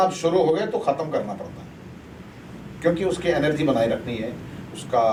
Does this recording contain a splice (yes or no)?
no